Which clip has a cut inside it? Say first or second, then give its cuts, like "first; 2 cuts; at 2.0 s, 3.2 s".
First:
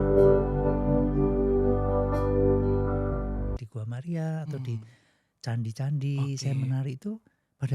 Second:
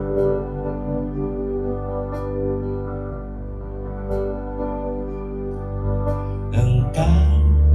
first; 1 cut; at 3.6 s